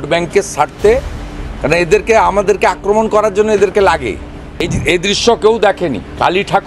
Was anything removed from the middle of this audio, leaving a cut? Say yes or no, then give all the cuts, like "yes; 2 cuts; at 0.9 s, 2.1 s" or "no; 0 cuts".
yes; 1 cut; at 4.7 s